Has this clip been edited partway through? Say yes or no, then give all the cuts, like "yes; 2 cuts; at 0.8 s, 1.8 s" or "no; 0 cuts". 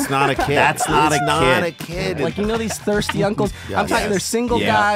yes; 1 cut; at 2.0 s